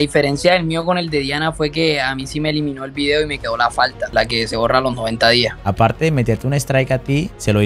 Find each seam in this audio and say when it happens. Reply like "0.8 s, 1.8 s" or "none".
5.6 s